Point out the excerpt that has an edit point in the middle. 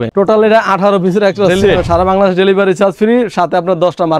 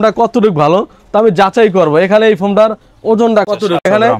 first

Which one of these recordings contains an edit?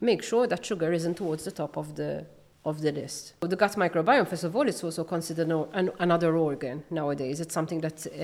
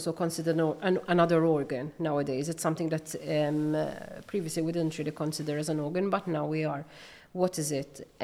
first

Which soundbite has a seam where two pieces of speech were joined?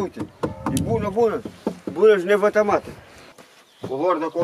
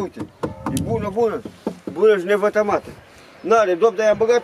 first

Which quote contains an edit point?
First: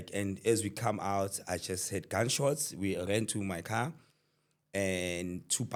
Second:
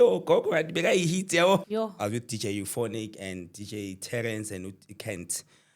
second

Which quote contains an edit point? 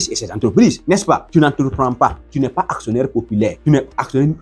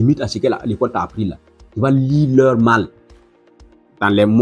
first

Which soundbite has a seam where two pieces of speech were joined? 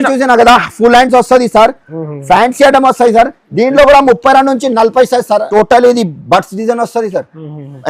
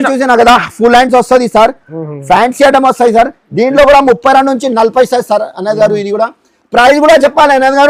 first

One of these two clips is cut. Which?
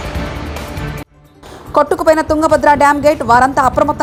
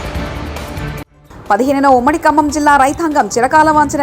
second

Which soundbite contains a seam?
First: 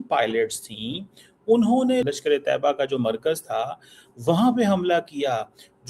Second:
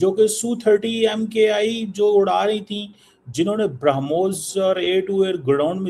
first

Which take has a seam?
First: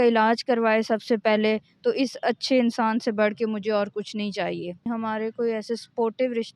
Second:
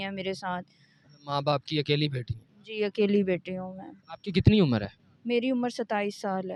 first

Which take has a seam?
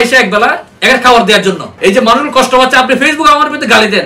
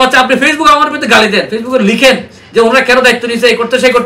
first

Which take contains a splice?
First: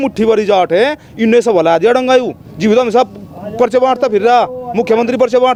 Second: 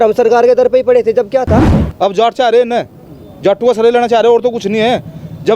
second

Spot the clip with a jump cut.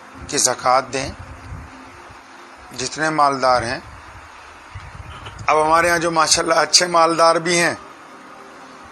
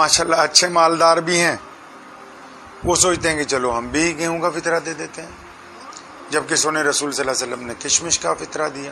first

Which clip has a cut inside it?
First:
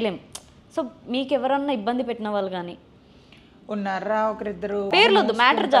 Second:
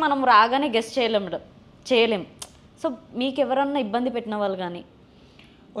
first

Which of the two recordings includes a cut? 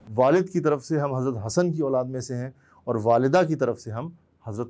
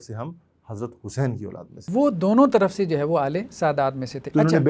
second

